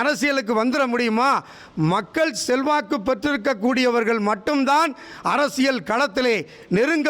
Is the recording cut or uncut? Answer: uncut